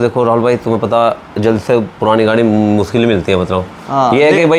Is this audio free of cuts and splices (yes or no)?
yes